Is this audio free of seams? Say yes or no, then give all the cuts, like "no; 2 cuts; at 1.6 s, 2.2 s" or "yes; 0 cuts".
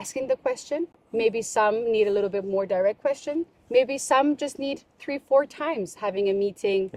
yes; 0 cuts